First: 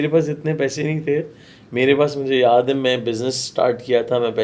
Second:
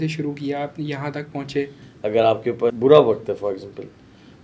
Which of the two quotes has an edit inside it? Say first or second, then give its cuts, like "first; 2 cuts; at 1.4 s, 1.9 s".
second; 2 cuts; at 1.8 s, 2.7 s